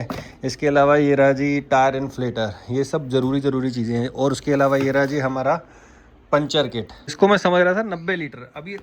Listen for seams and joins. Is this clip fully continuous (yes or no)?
no